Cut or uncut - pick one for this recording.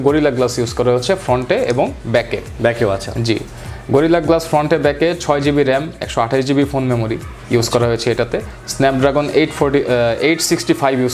uncut